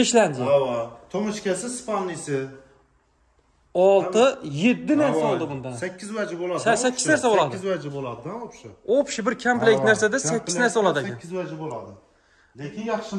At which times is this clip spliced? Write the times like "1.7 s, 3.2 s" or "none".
none